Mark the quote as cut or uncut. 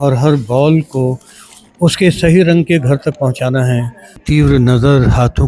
cut